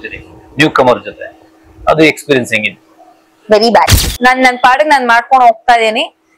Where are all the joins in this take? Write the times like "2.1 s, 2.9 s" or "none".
4.0 s